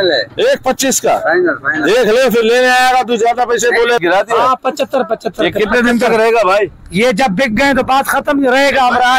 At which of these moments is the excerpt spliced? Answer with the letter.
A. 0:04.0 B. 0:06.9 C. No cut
A